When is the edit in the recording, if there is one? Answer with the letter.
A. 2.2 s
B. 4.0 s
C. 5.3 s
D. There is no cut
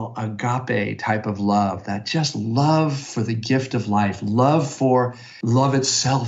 C